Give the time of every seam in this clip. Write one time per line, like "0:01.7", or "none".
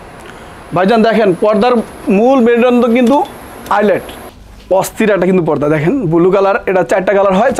0:04.2

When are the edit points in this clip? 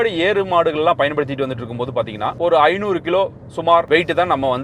0:02.2
0:03.9

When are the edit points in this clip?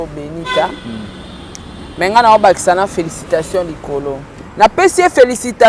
0:04.4

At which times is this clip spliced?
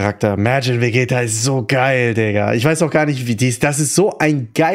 none

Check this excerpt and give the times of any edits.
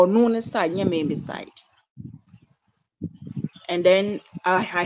none

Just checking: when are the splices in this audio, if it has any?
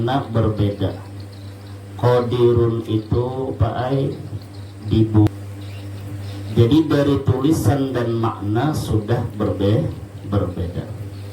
0:05.3

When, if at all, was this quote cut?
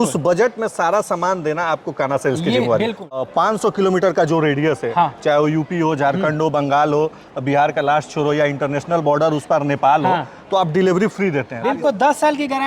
0:03.2
0:11.6

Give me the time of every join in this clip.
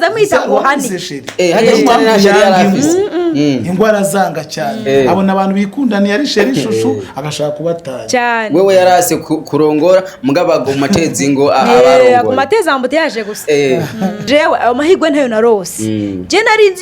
0:14.2

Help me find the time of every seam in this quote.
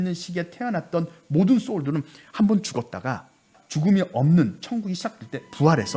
0:03.6

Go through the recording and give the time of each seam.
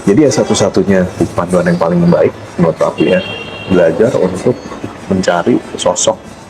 none

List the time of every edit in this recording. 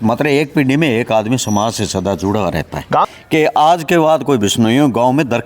0:03.1

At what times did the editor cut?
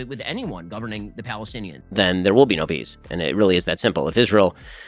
0:01.8

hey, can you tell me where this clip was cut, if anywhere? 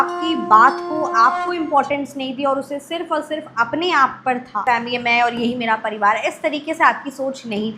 0:04.6

